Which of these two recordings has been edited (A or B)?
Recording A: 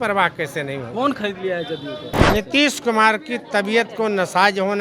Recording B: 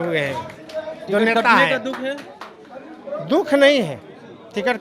A